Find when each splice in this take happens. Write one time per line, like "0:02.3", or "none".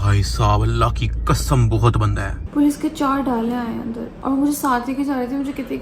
0:02.4